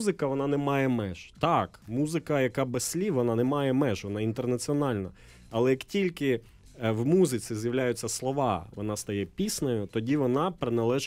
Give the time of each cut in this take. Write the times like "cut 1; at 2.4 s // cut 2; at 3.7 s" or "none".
none